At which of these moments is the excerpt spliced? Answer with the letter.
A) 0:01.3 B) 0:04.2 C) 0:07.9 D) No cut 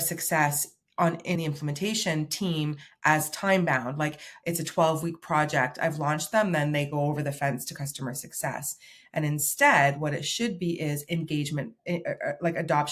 A